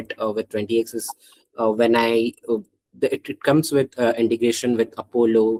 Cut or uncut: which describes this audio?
uncut